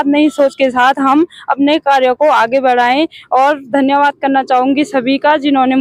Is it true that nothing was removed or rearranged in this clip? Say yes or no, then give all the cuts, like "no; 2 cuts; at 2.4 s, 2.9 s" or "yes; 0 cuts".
yes; 0 cuts